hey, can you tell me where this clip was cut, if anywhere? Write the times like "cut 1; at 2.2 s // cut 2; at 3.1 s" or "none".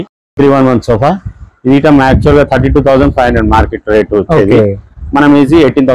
none

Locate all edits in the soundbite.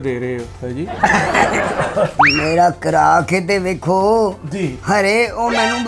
cut 1; at 2.1 s

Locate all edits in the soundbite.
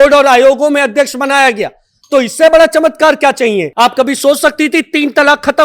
cut 1; at 3.7 s

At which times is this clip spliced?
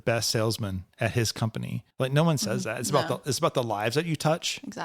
cut 1; at 1.8 s

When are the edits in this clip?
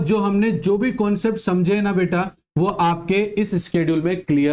none

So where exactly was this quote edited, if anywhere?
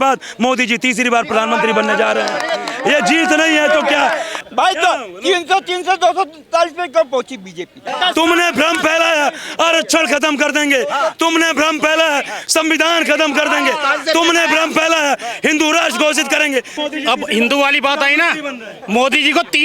cut 1; at 4.4 s // cut 2; at 7.9 s // cut 3; at 16.7 s

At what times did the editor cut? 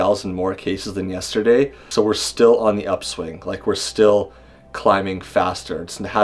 cut 1; at 1.8 s

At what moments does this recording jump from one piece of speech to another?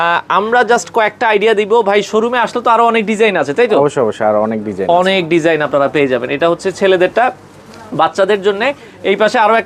none

